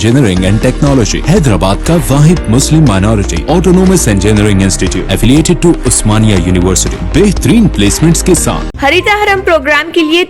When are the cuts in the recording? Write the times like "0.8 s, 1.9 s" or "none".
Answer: 8.7 s